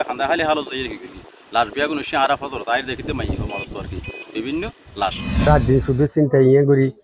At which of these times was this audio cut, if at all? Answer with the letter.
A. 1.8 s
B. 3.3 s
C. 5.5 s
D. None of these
C